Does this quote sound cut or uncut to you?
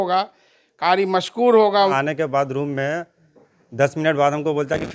cut